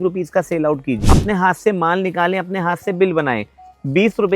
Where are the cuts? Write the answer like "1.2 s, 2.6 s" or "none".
1.0 s